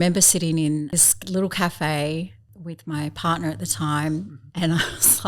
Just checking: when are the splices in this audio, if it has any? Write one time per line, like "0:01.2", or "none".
0:00.9
0:02.5

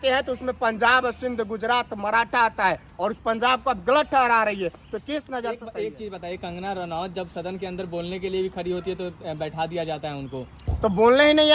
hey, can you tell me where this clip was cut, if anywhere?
0:05.6

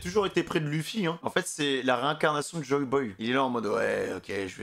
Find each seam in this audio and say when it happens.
0:01.2

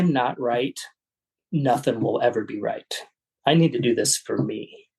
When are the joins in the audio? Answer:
none

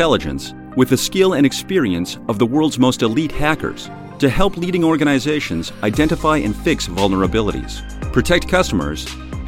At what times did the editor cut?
none

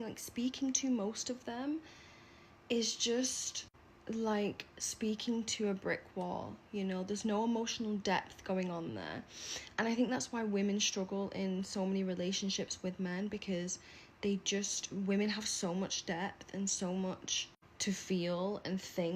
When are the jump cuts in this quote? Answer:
0:02.9

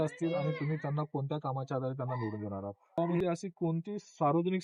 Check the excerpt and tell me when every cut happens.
0:02.8

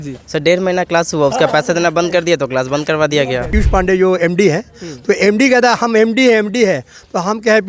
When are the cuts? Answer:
0:03.5

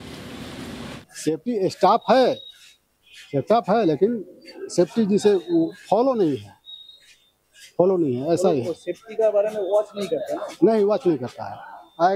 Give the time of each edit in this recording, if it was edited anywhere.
0:01.0

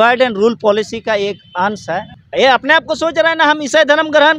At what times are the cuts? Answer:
0:02.2

